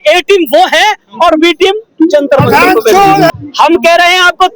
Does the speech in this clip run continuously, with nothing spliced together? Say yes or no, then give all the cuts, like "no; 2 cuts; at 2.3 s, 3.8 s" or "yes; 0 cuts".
no; 1 cut; at 3.3 s